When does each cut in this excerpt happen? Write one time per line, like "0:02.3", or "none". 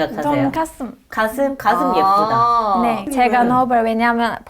0:03.1